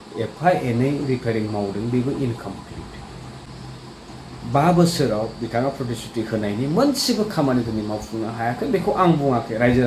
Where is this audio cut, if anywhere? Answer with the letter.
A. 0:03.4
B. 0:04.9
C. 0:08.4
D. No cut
A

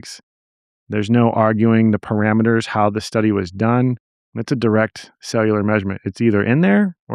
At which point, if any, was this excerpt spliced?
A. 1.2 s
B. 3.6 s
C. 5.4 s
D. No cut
D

